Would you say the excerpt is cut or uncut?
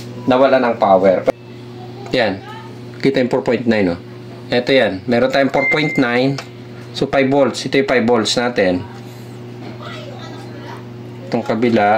cut